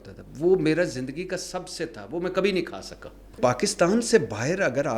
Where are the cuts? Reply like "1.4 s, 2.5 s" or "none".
3.4 s

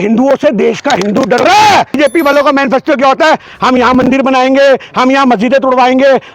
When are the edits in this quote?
2.0 s

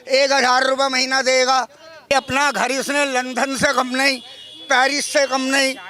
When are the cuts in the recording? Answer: 2.1 s

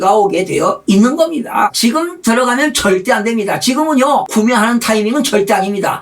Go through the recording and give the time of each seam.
1.7 s, 4.3 s

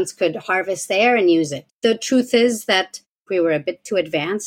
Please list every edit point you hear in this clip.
1.6 s, 3.3 s

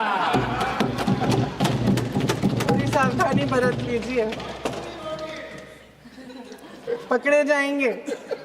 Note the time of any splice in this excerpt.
none

